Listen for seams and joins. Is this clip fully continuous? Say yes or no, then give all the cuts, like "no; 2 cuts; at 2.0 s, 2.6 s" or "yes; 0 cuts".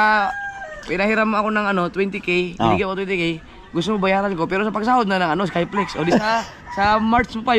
yes; 0 cuts